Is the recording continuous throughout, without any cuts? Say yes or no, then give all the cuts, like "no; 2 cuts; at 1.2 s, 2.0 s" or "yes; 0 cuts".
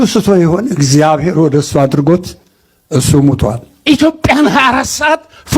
no; 1 cut; at 3.8 s